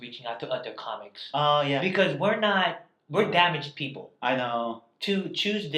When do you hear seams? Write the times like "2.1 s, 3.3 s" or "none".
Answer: none

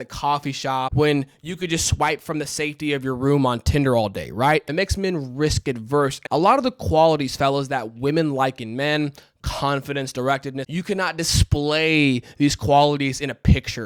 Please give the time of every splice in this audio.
0.9 s, 4.7 s, 6.2 s, 10.6 s

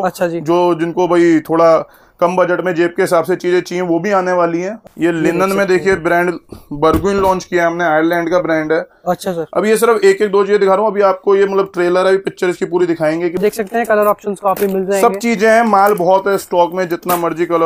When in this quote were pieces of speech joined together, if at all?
4.8 s, 13.4 s

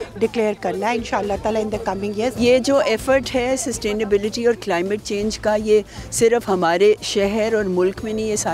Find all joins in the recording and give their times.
2.4 s

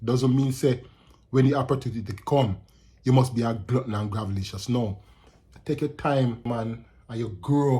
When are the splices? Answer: 6.5 s

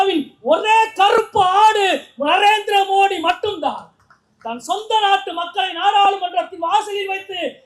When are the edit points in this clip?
none

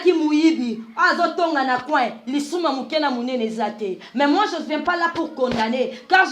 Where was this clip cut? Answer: none

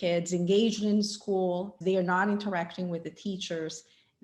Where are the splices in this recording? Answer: 1.7 s

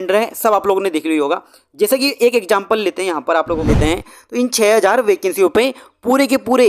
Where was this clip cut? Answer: 3.7 s

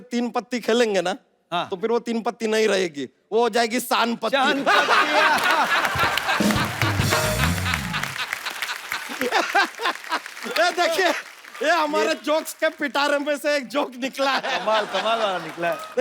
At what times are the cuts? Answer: none

